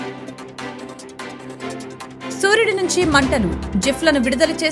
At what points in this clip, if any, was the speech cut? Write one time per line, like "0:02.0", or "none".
0:01.5